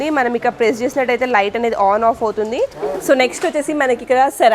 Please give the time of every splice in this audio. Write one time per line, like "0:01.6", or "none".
0:02.8

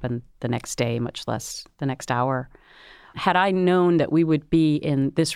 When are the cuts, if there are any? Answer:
0:03.2

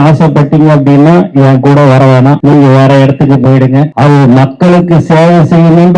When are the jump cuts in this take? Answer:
0:02.4
0:03.9

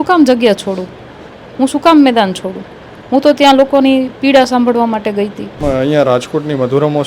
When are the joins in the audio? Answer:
0:05.6

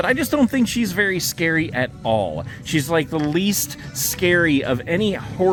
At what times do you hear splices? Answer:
none

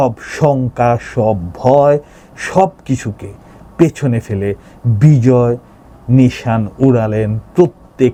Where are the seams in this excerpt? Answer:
none

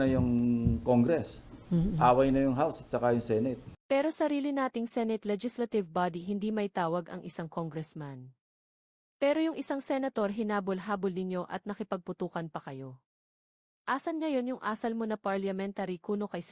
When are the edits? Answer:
0:03.7

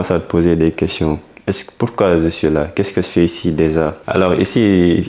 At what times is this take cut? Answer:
0:04.0

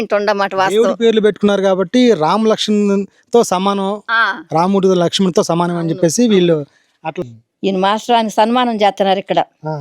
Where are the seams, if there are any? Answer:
0:07.2

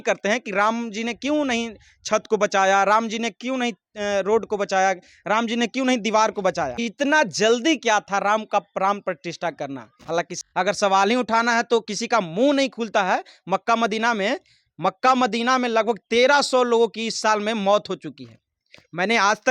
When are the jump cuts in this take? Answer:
0:06.8
0:10.3

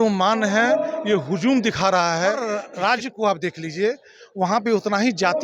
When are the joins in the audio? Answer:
0:02.6

